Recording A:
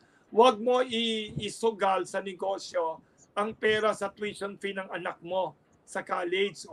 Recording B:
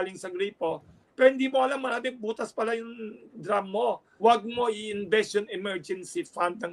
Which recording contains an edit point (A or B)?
B